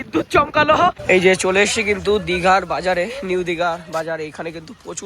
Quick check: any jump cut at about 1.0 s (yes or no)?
yes